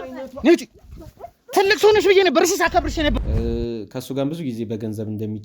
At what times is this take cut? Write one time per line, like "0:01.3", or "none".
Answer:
0:03.3